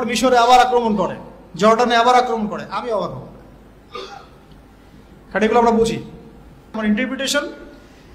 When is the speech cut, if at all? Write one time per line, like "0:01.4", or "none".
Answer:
0:06.8